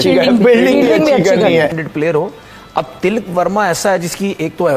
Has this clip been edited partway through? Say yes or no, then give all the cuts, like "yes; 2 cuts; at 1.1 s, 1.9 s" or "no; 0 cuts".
yes; 1 cut; at 1.7 s